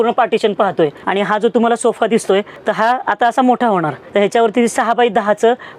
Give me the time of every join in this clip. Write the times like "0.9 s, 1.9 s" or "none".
1.0 s, 2.6 s